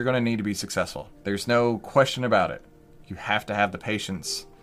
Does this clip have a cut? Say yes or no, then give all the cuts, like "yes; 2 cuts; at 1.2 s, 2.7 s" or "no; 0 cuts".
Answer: yes; 1 cut; at 1.1 s